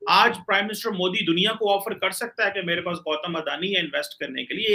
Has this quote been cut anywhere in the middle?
no; 0 cuts

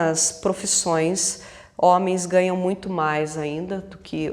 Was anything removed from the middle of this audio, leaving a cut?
no; 0 cuts

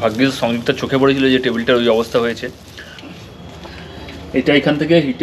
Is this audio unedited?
no; 1 cut; at 3.1 s

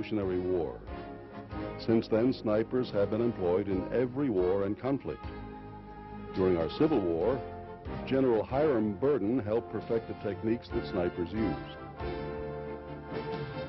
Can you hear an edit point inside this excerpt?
yes; 1 cut; at 5.5 s

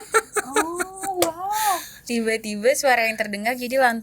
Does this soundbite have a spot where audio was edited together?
yes; 1 cut; at 1.9 s

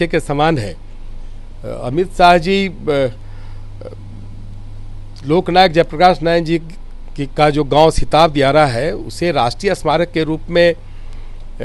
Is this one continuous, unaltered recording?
yes; 0 cuts

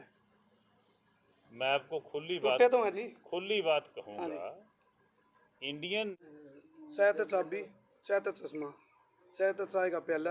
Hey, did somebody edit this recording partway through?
yes; 1 cut; at 6.2 s

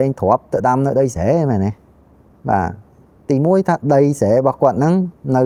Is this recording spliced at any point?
no; 0 cuts

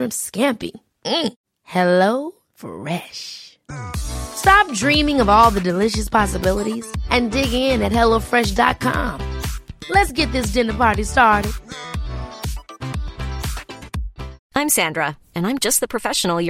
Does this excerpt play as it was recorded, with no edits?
no; 1 cut; at 14.4 s

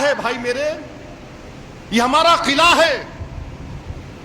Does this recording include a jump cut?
no; 0 cuts

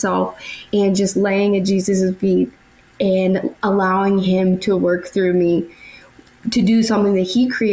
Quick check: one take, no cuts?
yes; 0 cuts

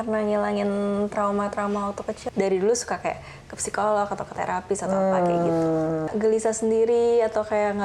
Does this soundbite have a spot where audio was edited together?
yes; 2 cuts; at 2.2 s, 6.1 s

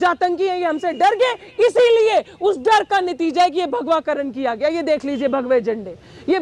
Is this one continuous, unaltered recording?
yes; 0 cuts

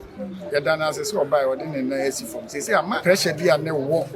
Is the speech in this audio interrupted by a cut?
yes; 1 cut; at 3.0 s

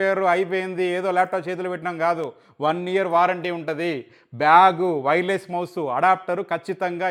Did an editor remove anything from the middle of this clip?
no; 0 cuts

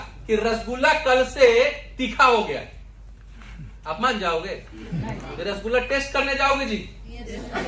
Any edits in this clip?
no; 0 cuts

